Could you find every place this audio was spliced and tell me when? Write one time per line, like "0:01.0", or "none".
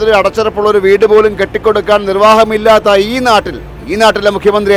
none